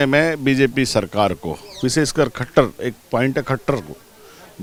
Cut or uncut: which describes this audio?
uncut